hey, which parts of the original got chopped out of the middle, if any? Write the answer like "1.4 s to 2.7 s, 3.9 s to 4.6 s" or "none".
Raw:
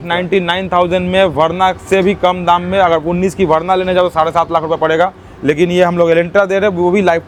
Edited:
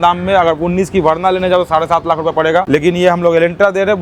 5.1 s to 5.4 s